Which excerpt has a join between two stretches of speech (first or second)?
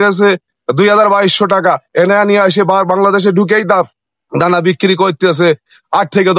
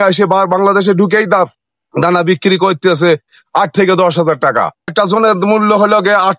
second